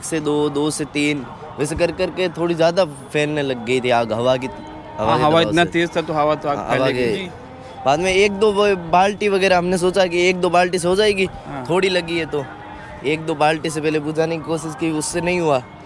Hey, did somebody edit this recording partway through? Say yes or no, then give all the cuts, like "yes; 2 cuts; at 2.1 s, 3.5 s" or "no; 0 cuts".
no; 0 cuts